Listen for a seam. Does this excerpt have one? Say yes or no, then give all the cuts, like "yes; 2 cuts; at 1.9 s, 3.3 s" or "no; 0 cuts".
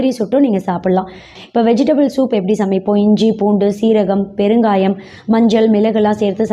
yes; 1 cut; at 1.3 s